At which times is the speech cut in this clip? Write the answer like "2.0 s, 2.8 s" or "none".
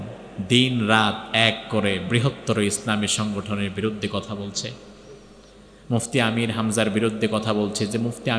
none